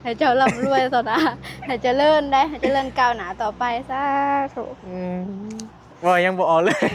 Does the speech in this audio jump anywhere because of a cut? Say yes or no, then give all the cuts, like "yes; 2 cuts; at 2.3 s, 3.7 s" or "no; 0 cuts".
no; 0 cuts